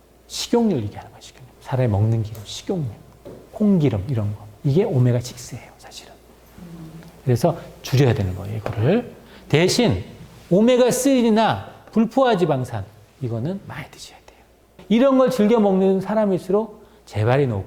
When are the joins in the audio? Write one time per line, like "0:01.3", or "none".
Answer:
0:14.7